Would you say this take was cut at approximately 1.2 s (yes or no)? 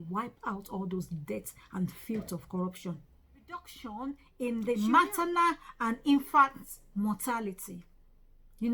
no